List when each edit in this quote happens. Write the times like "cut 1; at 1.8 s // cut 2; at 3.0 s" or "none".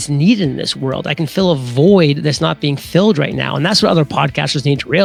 none